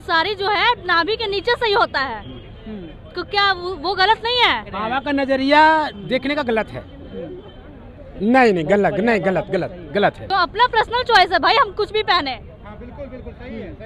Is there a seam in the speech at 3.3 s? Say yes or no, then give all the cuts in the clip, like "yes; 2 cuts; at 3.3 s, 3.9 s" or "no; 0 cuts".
no; 3 cuts; at 4.8 s, 8.0 s, 10.2 s